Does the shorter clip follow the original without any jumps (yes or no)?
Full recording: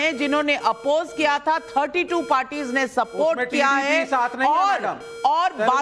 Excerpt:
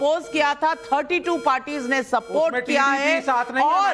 yes